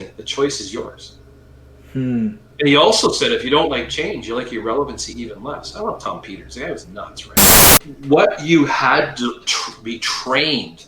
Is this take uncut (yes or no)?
no